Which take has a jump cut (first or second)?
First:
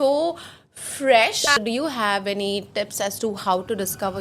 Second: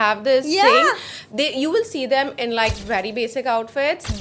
first